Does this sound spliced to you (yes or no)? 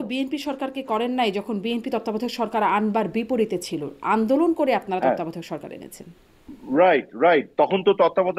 no